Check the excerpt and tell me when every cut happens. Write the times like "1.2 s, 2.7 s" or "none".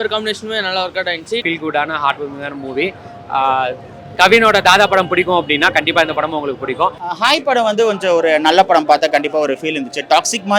1.4 s, 7.0 s